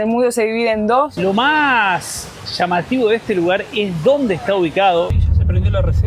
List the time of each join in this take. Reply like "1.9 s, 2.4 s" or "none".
1.1 s, 5.1 s